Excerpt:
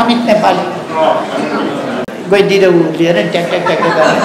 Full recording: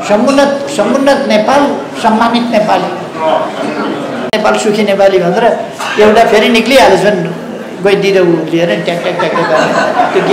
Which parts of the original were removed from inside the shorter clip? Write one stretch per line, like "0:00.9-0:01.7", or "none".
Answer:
0:04.2-0:07.5